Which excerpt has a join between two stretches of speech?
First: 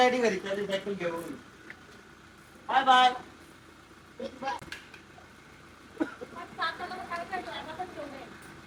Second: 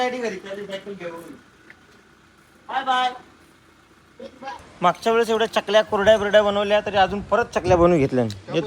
second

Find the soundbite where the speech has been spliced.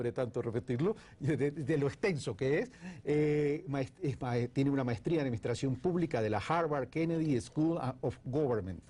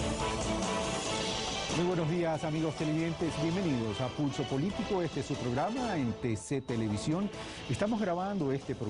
second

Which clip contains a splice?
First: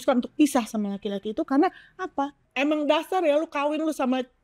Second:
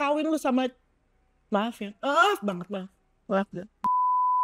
first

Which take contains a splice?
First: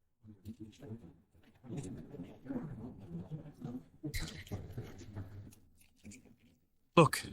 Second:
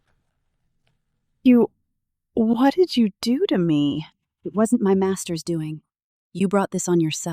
first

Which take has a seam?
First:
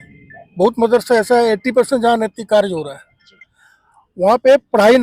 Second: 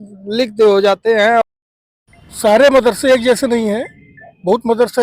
second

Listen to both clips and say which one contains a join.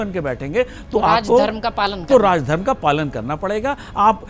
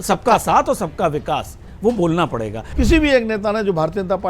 second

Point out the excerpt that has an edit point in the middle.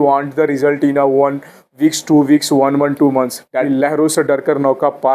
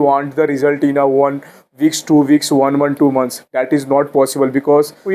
first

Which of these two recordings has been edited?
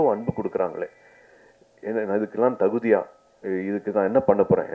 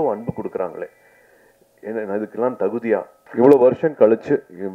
second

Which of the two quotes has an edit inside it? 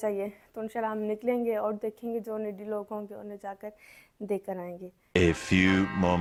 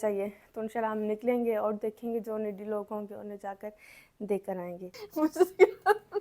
second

